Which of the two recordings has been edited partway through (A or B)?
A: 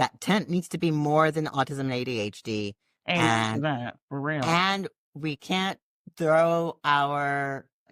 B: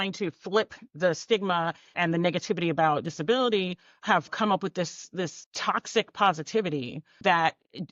B